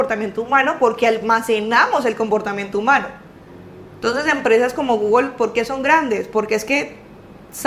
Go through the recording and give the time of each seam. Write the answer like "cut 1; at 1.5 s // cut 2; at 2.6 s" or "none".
none